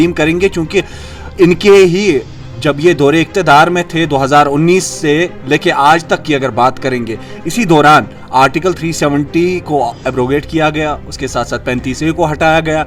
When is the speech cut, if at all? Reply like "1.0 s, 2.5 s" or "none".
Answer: none